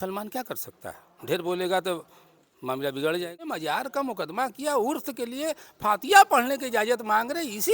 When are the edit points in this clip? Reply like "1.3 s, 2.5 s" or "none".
3.5 s